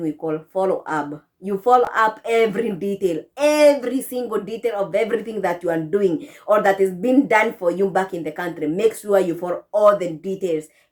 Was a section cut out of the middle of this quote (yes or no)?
no